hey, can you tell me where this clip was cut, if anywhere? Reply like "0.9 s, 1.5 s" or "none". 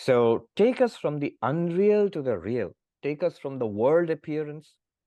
2.9 s